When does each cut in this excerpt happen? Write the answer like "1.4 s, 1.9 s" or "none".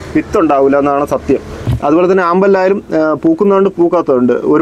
1.6 s